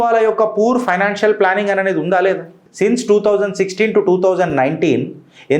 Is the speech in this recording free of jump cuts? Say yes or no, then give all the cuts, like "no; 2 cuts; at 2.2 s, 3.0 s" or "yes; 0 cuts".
no; 1 cut; at 2.6 s